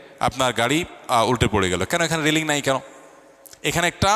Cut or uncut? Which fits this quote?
uncut